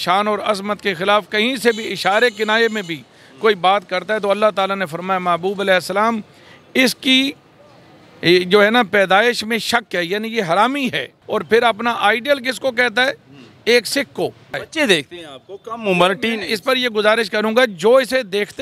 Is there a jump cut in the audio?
yes; 2 cuts; at 11.1 s, 14.6 s

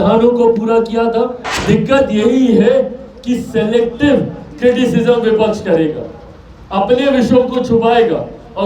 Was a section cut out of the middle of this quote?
yes; 1 cut; at 1.5 s

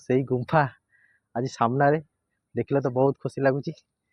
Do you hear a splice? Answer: no; 0 cuts

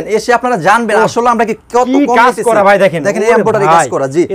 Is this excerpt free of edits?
yes; 0 cuts

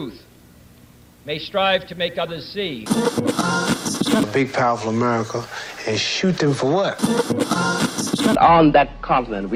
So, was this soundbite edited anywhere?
no; 0 cuts

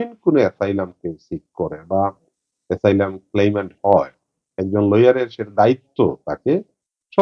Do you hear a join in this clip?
no; 0 cuts

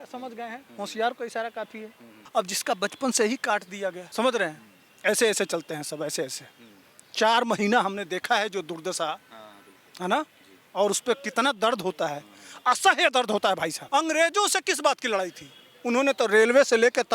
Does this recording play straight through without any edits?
no; 3 cuts; at 2.2 s, 4.0 s, 13.8 s

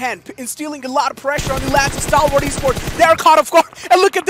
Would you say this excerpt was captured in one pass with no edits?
yes; 0 cuts

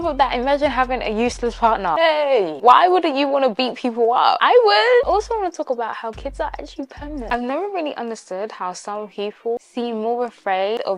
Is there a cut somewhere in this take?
yes; 3 cuts; at 5.0 s, 7.3 s, 9.7 s

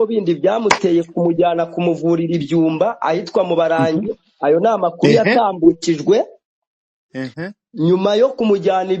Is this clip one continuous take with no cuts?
yes; 0 cuts

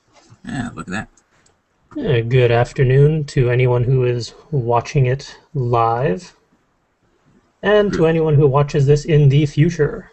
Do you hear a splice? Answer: no; 0 cuts

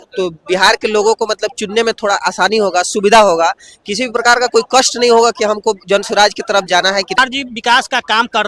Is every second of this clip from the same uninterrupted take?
no; 1 cut; at 7.2 s

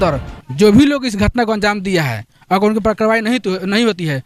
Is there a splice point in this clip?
no; 0 cuts

